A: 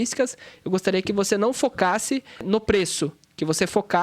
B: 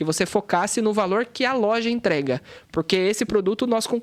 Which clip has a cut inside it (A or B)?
A